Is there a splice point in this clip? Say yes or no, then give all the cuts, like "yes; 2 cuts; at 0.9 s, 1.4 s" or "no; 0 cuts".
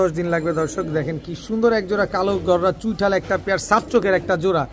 no; 0 cuts